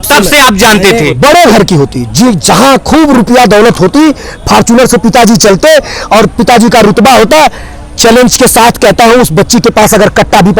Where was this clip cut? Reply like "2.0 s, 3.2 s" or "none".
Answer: 1.1 s